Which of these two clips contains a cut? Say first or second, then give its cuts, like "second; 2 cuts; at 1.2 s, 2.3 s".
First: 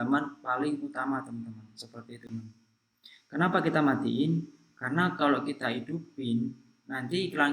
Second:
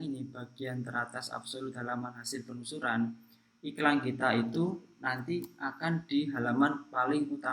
first; 1 cut; at 2.2 s